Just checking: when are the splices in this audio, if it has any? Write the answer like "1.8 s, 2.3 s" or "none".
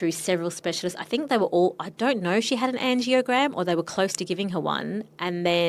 none